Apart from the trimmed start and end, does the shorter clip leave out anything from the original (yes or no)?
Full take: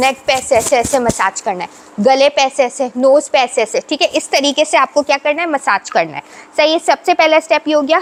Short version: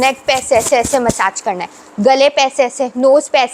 no